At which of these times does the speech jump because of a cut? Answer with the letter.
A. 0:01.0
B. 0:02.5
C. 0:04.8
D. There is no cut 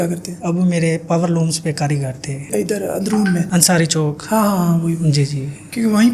D